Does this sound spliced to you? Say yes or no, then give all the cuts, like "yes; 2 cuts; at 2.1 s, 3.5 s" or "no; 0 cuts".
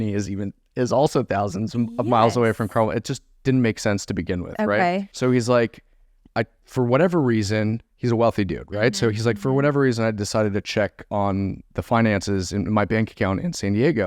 yes; 1 cut; at 5.1 s